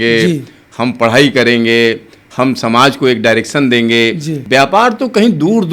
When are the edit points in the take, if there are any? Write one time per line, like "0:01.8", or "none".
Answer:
0:04.3